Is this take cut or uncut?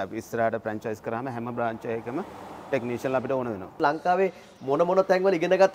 cut